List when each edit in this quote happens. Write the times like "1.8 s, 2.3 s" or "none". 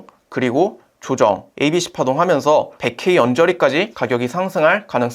1.5 s, 2.8 s, 4.0 s